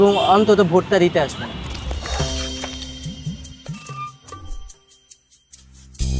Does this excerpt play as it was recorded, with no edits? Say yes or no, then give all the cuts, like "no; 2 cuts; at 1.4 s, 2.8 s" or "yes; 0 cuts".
yes; 0 cuts